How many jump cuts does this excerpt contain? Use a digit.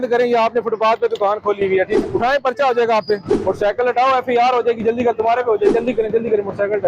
3